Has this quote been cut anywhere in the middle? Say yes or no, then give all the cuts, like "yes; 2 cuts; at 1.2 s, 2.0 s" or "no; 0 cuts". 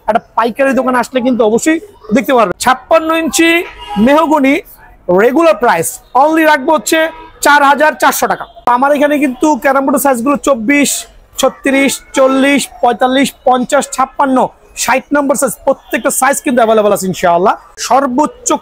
yes; 3 cuts; at 2.6 s, 8.5 s, 17.7 s